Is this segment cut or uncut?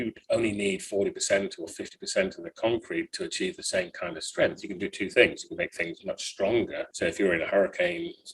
cut